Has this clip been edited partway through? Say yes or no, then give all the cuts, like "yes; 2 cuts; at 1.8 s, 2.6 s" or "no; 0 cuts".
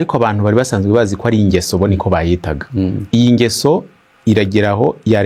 no; 0 cuts